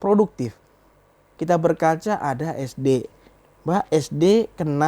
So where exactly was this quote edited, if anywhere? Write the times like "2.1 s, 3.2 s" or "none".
1.3 s